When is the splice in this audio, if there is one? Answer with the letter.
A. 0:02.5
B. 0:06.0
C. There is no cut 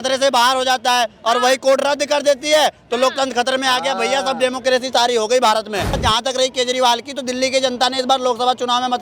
B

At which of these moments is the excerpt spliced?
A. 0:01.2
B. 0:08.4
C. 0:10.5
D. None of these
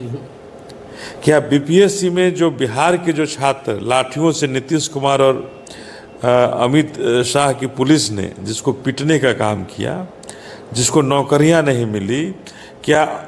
D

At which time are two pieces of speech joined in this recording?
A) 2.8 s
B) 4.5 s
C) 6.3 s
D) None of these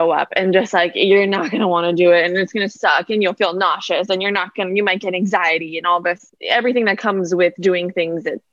C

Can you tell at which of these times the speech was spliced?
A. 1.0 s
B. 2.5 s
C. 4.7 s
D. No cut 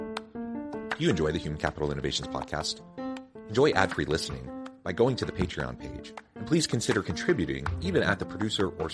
A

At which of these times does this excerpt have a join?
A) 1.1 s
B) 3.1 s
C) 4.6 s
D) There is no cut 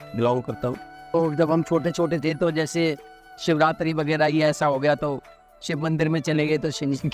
A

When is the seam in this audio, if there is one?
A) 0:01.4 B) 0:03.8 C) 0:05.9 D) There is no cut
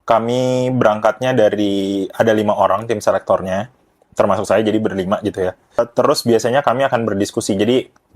C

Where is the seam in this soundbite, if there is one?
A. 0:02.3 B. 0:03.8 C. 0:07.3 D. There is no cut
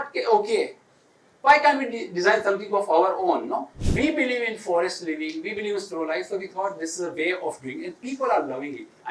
B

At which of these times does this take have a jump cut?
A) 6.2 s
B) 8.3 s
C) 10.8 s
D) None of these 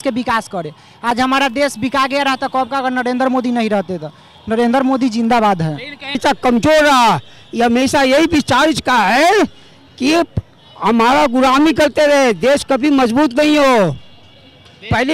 A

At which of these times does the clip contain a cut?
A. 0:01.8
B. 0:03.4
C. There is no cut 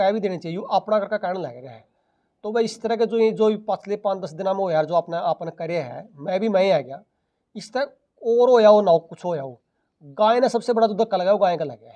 C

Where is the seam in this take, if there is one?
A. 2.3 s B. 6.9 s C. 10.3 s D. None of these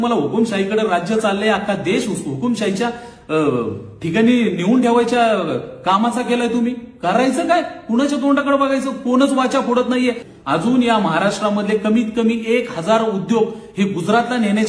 C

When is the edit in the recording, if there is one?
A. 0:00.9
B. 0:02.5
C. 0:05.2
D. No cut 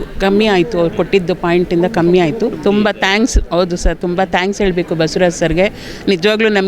B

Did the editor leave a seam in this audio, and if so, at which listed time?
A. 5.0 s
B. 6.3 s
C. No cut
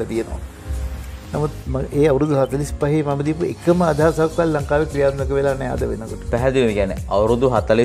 C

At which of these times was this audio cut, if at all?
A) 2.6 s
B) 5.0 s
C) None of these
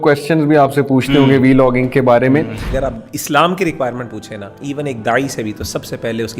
A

